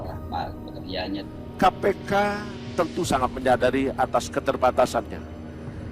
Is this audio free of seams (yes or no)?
no